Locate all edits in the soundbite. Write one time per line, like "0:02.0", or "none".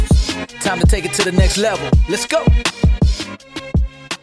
none